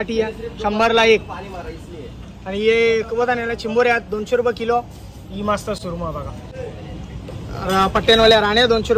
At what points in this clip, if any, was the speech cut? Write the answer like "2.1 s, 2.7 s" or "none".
none